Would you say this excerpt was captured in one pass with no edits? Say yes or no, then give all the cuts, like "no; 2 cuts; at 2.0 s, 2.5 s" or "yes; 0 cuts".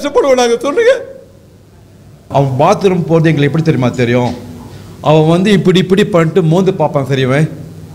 no; 1 cut; at 2.3 s